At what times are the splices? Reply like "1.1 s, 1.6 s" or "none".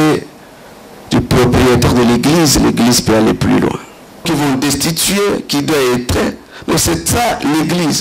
4.3 s